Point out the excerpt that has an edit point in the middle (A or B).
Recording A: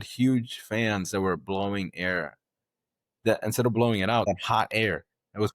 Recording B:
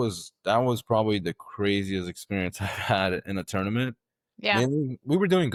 A